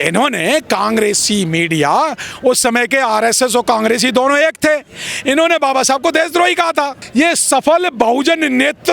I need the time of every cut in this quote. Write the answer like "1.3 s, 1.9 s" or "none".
7.0 s